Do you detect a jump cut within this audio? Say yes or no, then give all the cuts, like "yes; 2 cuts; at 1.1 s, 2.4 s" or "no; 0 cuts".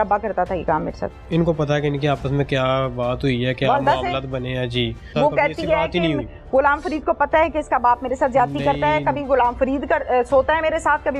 yes; 2 cuts; at 1.2 s, 5.1 s